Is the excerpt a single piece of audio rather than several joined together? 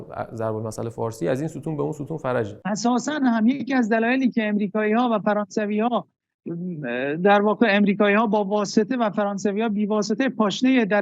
no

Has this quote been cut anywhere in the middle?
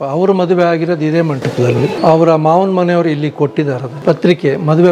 yes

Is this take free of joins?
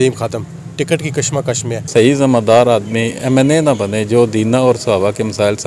no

